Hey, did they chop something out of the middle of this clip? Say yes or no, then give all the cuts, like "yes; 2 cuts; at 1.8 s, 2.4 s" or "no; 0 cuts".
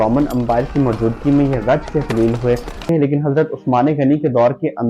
yes; 1 cut; at 2.8 s